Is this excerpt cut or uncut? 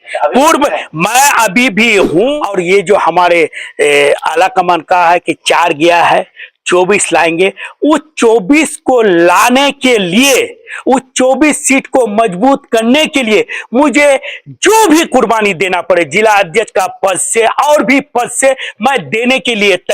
cut